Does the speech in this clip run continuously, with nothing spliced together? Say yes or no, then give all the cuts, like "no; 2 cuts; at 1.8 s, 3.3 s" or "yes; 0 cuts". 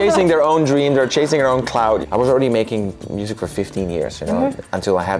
no; 1 cut; at 2.0 s